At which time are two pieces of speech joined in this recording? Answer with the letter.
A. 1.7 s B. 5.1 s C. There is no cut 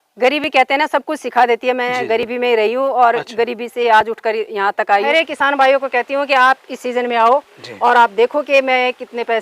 B